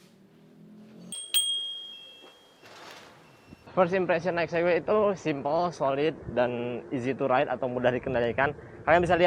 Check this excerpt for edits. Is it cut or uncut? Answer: uncut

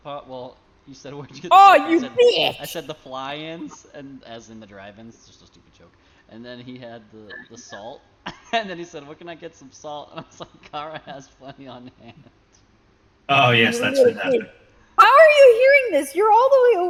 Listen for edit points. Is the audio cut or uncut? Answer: uncut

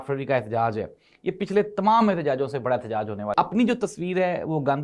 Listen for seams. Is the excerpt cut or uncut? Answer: cut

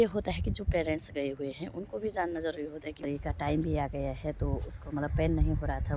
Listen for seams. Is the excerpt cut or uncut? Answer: cut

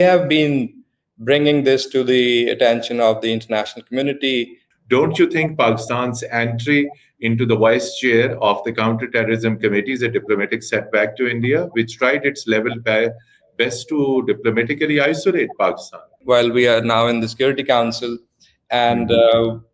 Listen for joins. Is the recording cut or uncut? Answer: cut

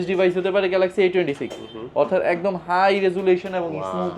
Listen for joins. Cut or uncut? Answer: uncut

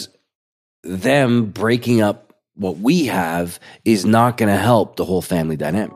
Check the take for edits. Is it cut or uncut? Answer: uncut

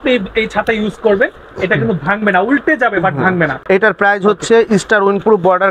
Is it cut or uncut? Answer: uncut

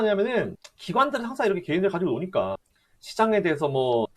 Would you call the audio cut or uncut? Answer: uncut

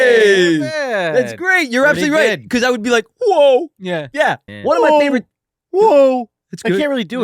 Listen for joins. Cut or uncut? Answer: cut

